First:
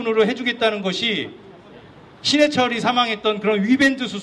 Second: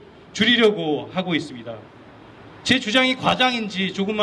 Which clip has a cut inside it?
second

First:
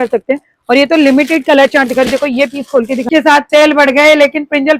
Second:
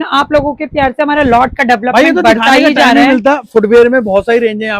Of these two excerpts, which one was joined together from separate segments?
first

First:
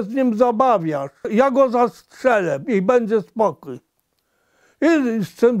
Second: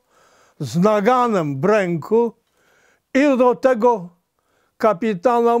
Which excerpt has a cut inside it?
first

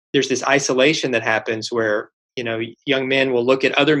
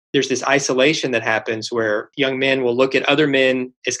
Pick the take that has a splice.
second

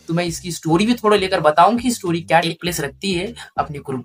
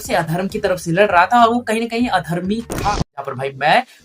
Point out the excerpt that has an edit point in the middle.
second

